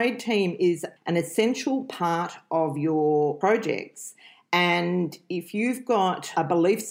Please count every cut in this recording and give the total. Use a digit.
2